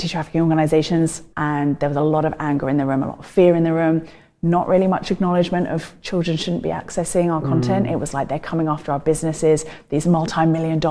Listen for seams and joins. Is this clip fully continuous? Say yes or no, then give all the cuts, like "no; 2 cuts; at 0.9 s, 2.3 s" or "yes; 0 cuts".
no; 1 cut; at 1.3 s